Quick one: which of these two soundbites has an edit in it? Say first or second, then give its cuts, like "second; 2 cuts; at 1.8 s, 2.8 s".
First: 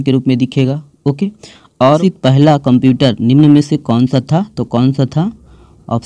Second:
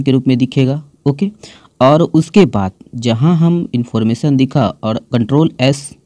first; 1 cut; at 2.0 s